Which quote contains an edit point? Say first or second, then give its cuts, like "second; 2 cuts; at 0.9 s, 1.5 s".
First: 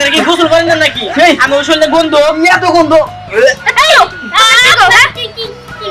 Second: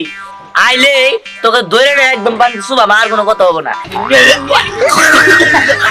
second; 1 cut; at 3.8 s